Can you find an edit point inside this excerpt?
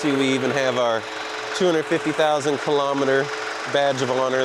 no; 0 cuts

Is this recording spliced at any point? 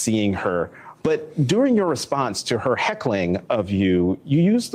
no; 0 cuts

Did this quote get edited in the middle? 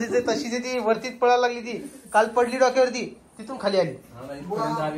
no; 0 cuts

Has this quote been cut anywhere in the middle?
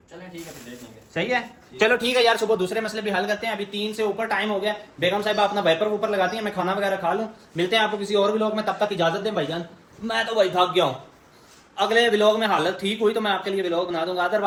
no; 0 cuts

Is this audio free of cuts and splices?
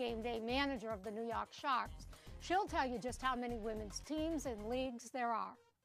no; 1 cut; at 1.4 s

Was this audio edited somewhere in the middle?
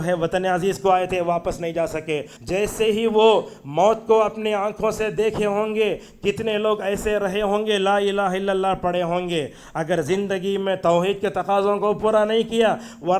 yes; 1 cut; at 2.3 s

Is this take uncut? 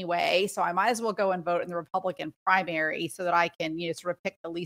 yes; 0 cuts

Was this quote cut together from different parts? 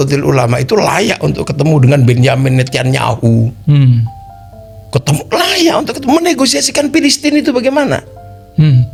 no; 0 cuts

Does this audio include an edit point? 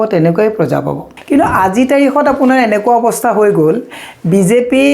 yes; 1 cut; at 1.0 s

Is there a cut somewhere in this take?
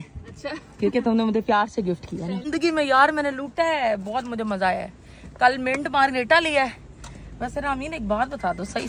no; 0 cuts

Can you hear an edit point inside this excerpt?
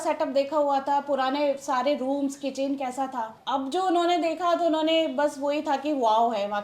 no; 0 cuts

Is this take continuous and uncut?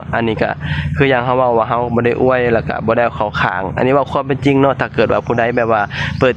yes; 0 cuts

